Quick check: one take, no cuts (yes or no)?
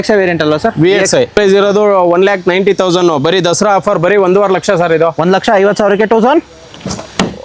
no